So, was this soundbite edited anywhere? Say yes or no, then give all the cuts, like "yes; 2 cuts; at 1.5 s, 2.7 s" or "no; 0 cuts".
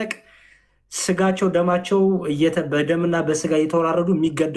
no; 0 cuts